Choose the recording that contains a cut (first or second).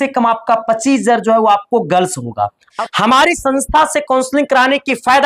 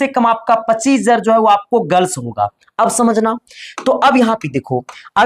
first